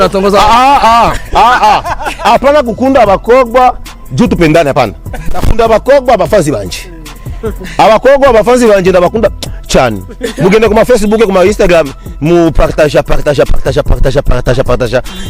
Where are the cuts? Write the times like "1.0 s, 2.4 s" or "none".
none